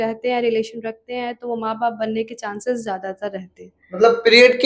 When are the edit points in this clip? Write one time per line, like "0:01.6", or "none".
none